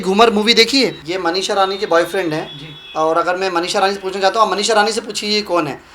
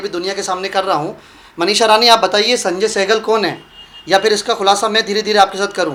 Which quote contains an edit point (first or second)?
first